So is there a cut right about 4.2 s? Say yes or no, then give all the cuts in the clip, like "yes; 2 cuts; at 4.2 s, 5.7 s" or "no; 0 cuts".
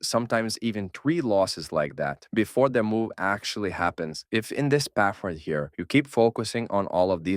yes; 1 cut; at 4.2 s